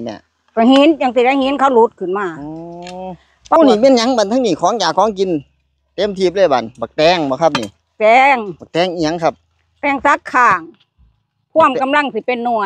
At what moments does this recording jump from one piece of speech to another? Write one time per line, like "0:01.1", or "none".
0:03.6